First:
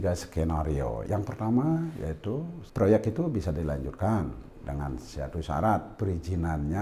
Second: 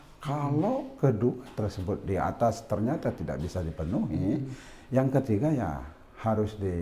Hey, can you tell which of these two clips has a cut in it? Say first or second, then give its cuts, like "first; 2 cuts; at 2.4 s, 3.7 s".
first; 2 cuts; at 1.0 s, 2.6 s